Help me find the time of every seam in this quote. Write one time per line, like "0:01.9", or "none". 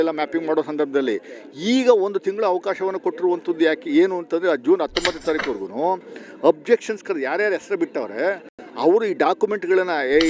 none